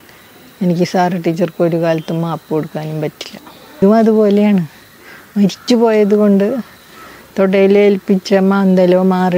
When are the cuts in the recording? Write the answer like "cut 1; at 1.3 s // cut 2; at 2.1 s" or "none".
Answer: cut 1; at 3.8 s